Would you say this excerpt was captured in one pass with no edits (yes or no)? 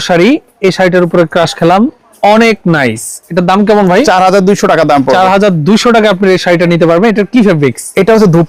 yes